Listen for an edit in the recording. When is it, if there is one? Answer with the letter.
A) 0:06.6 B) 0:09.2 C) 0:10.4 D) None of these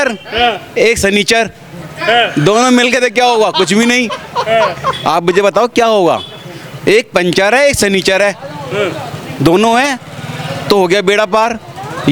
D